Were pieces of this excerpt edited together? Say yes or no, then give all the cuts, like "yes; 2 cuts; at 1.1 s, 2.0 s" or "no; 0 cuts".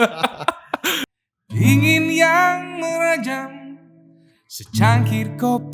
yes; 1 cut; at 1.1 s